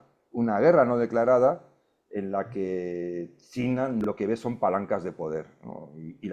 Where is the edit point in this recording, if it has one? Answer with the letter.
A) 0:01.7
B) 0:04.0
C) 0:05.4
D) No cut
B